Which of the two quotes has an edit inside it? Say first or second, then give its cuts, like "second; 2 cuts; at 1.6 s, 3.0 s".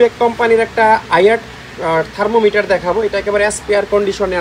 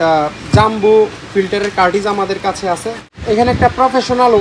second; 1 cut; at 3.0 s